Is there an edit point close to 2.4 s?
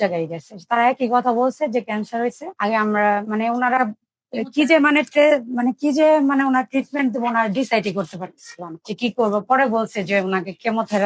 no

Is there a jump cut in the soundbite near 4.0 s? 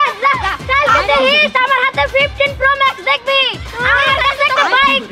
no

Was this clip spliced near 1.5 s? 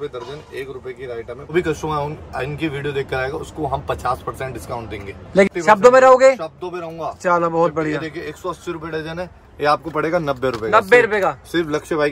yes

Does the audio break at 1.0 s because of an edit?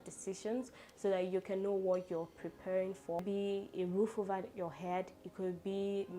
no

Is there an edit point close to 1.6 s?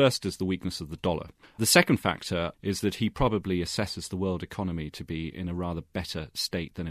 yes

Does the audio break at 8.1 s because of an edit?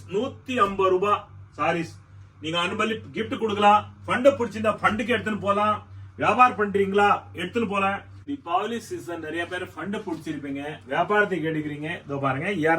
yes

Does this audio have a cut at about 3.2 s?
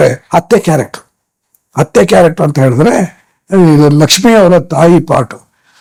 no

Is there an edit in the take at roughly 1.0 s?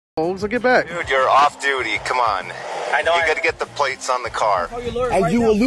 yes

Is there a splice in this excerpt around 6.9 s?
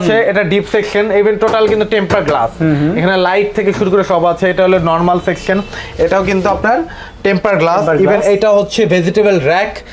no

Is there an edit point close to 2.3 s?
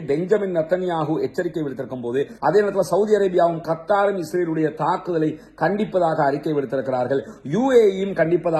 yes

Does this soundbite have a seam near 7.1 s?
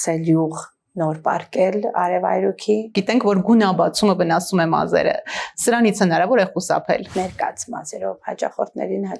yes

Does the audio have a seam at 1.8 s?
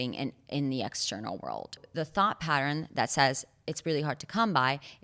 yes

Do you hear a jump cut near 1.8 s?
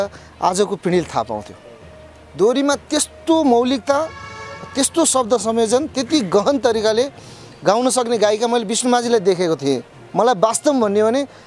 no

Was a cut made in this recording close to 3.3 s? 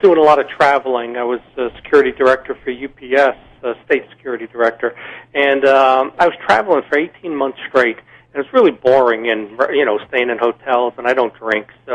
yes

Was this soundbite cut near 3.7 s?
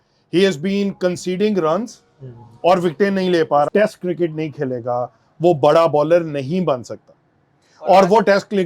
yes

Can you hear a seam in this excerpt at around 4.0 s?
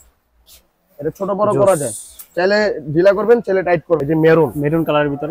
yes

